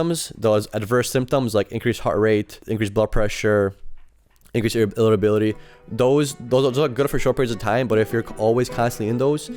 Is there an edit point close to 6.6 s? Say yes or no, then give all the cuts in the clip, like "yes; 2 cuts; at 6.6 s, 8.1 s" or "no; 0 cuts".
no; 1 cut; at 2.6 s